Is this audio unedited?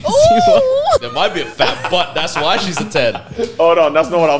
no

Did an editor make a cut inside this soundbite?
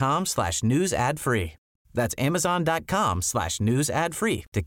no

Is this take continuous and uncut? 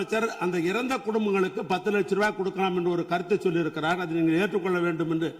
yes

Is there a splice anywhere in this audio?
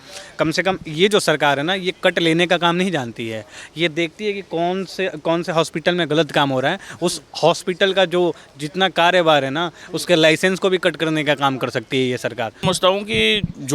yes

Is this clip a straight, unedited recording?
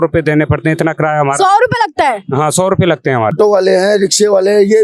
no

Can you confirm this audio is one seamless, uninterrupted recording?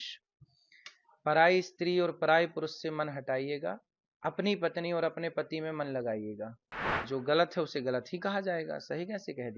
no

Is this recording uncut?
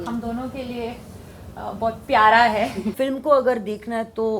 no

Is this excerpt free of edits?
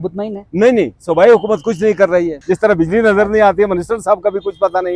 no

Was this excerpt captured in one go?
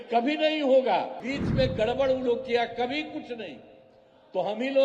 no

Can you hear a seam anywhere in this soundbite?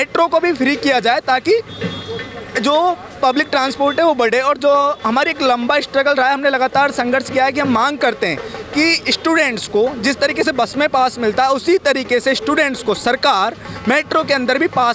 no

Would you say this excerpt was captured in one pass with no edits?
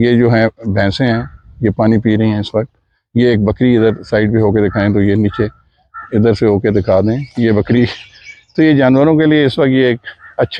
yes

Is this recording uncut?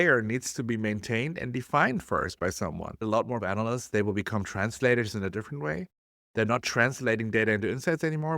no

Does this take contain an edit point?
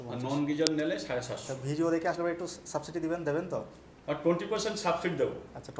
no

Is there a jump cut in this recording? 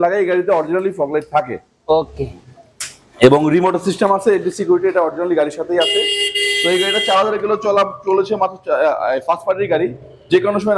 no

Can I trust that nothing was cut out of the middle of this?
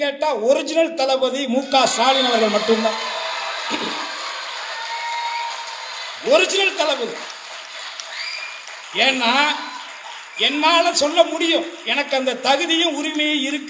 yes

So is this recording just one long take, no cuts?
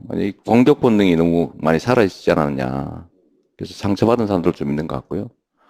no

